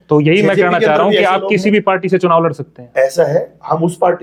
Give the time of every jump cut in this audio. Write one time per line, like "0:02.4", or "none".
none

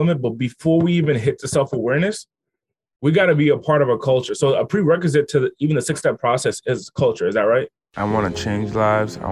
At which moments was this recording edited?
0:07.8

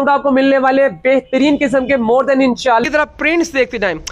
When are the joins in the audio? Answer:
0:02.8

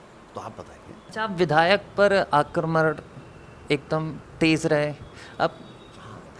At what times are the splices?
0:01.1

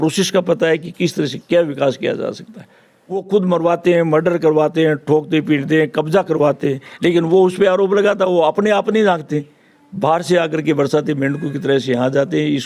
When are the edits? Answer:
0:02.6

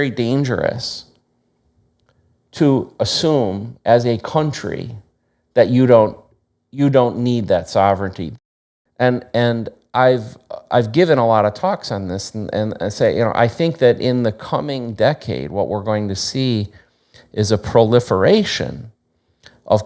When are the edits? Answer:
0:08.2

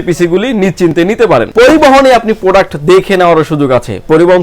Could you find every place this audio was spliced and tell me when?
0:01.5

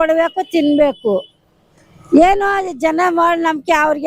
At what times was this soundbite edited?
none

